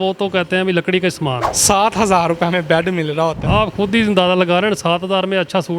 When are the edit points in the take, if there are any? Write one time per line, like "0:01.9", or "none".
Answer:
0:01.5
0:03.4